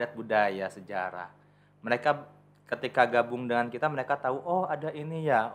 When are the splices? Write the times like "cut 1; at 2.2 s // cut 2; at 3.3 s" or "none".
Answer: none